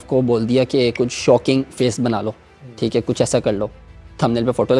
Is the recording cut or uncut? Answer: uncut